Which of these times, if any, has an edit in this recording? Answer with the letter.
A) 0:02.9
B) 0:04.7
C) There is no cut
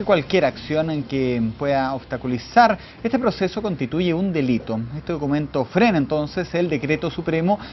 B